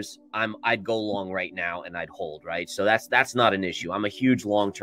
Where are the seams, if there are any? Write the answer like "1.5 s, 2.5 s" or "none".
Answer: none